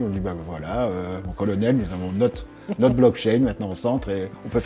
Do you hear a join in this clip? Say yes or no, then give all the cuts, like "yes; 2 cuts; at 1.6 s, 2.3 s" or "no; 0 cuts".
no; 0 cuts